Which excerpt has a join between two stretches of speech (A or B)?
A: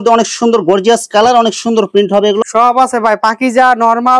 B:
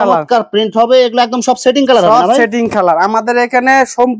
A